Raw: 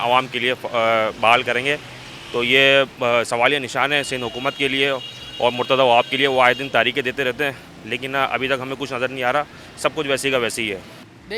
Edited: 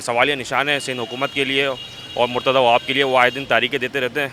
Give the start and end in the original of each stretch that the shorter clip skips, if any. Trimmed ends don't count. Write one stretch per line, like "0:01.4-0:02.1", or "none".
none